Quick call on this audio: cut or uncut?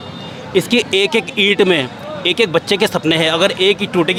uncut